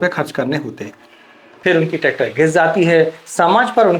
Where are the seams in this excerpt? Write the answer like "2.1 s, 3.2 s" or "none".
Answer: 1.5 s

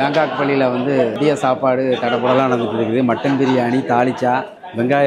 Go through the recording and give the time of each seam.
1.2 s

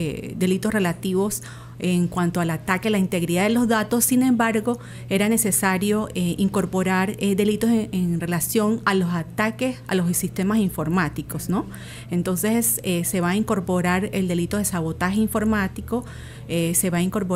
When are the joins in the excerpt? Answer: none

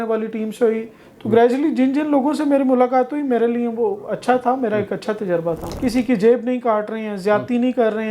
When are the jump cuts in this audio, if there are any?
5.7 s

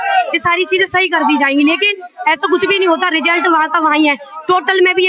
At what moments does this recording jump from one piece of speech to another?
none

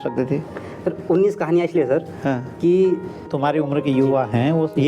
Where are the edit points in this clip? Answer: 3.3 s

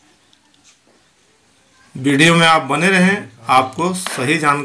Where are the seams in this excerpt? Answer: none

